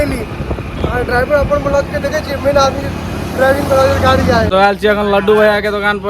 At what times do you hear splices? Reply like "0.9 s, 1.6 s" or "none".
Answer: 4.5 s